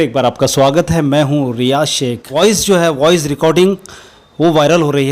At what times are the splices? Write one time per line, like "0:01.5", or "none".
0:02.2